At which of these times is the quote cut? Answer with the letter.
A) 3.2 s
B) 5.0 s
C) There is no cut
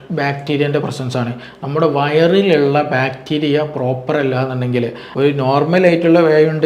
B